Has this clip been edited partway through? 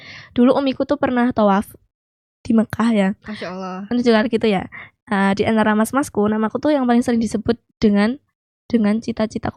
no; 0 cuts

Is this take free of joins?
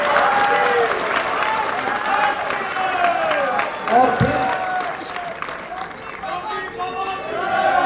yes; 0 cuts

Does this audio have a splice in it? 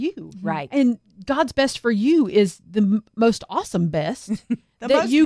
yes; 1 cut; at 1.1 s

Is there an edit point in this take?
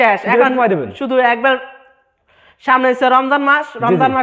no; 0 cuts

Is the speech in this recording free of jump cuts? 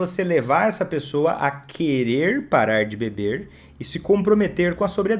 yes; 0 cuts

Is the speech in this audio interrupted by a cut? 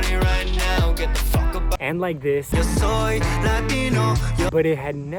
no; 0 cuts

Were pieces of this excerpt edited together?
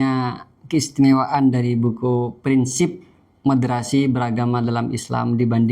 no; 0 cuts

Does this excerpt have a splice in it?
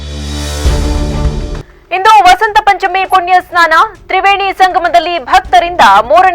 yes; 1 cut; at 1.6 s

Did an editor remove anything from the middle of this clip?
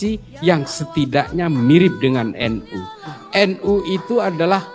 yes; 1 cut; at 3.2 s

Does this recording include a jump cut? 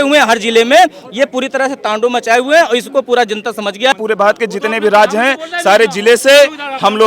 yes; 1 cut; at 3.9 s

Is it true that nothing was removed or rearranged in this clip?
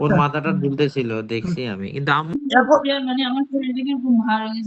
no; 1 cut; at 2.3 s

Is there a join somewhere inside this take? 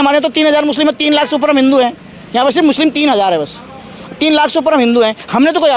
no; 0 cuts

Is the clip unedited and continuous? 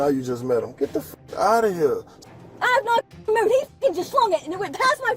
no; 1 cut; at 2.1 s

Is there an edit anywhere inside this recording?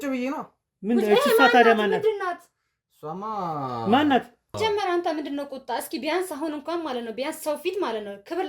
yes; 1 cut; at 4.6 s

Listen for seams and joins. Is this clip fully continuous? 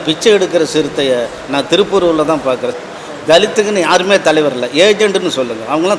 no; 1 cut; at 2.7 s

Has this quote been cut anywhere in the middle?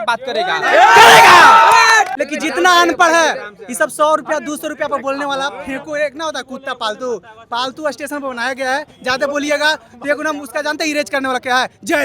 yes; 1 cut; at 2.1 s

